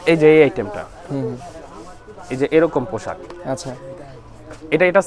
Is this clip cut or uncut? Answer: uncut